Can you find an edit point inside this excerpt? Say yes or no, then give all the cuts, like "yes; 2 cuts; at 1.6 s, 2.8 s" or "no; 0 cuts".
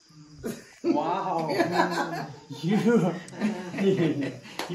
no; 0 cuts